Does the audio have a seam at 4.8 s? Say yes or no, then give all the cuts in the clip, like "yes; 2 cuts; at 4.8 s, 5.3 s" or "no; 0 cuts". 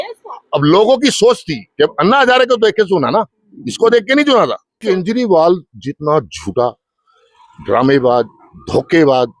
yes; 1 cut; at 4.8 s